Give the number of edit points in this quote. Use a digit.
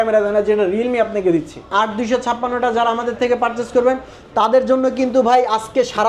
1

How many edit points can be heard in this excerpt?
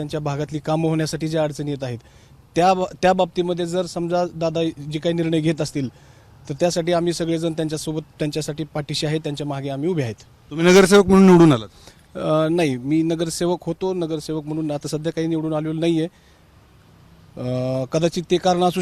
0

